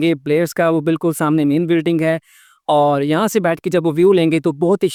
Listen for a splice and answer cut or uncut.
uncut